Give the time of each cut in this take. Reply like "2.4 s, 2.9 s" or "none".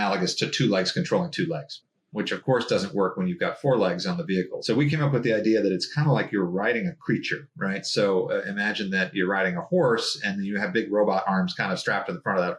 1.8 s